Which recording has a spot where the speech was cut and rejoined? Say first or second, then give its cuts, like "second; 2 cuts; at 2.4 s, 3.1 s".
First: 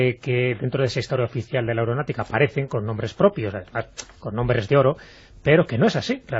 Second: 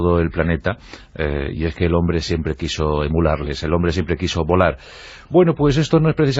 first; 1 cut; at 4.0 s